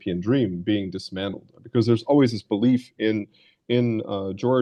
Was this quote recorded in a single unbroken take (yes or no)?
yes